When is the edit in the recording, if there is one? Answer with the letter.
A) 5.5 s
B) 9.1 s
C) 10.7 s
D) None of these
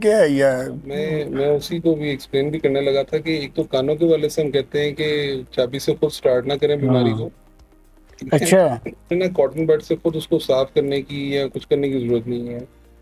B